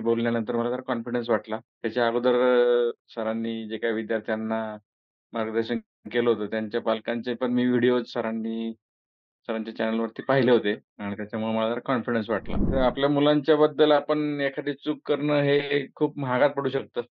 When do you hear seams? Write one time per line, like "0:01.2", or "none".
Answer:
0:12.6